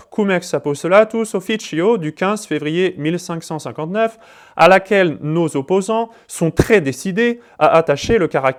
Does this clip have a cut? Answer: no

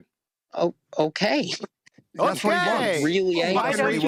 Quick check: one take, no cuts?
yes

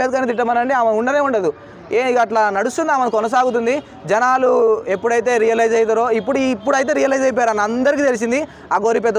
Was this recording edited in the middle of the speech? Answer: no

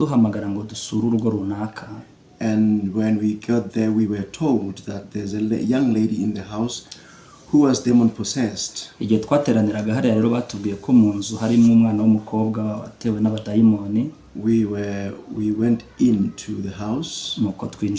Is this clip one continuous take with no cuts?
yes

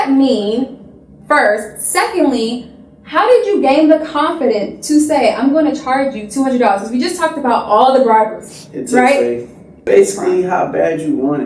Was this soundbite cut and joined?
yes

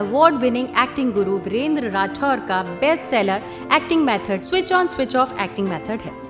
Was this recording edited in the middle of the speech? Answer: no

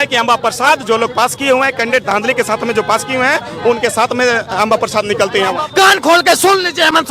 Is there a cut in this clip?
yes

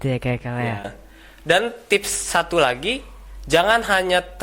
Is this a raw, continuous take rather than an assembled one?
no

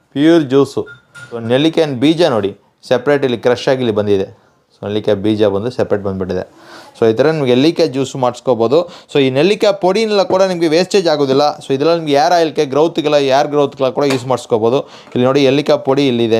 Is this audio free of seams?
yes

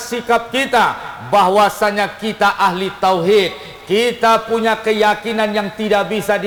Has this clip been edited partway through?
no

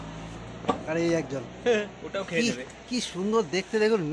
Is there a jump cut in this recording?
no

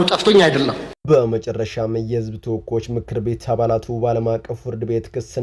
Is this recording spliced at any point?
no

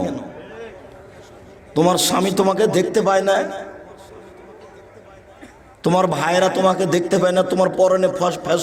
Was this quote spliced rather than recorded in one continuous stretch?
no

